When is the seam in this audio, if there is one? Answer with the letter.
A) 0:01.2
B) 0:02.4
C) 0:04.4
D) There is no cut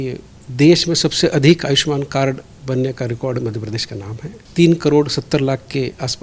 C